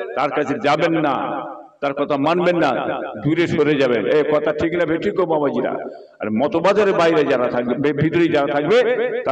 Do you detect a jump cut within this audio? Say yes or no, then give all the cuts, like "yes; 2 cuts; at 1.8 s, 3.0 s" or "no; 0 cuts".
no; 0 cuts